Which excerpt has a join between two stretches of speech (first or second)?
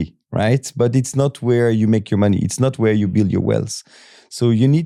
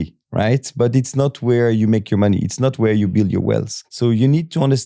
second